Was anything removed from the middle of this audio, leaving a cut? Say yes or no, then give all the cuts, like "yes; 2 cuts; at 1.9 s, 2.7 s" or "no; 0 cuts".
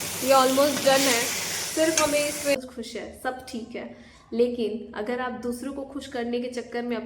yes; 1 cut; at 2.6 s